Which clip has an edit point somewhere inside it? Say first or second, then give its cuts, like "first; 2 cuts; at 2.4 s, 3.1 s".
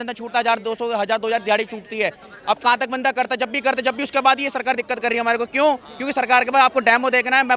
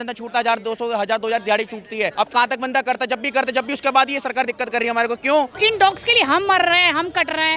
second; 2 cuts; at 2.1 s, 5.6 s